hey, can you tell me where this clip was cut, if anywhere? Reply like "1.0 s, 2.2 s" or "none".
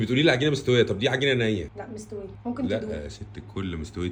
none